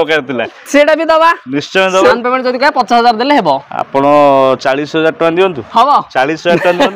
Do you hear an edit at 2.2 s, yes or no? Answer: yes